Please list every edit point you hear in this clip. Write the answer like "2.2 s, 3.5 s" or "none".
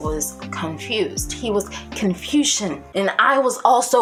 none

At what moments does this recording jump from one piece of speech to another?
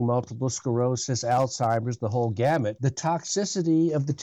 2.8 s

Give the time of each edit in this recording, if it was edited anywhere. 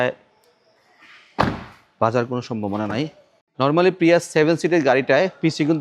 3.5 s

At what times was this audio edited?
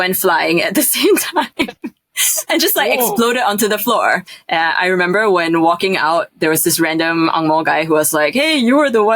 4.3 s

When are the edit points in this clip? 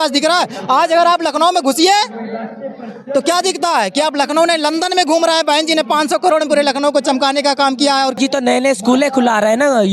8.2 s

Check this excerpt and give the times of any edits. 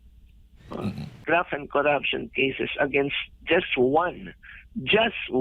1.1 s

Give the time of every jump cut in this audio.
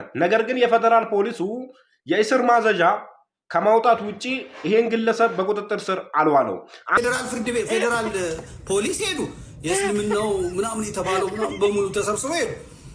6.9 s

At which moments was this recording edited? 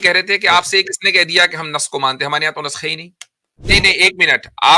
3.6 s

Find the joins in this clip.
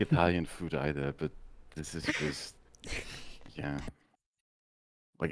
none

